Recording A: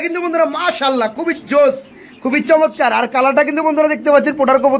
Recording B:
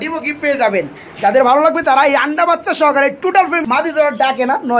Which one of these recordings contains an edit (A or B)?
B